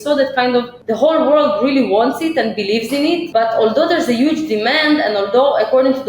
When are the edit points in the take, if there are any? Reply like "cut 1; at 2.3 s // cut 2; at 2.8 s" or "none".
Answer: cut 1; at 3.2 s